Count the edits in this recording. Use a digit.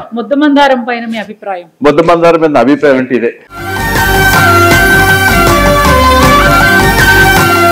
0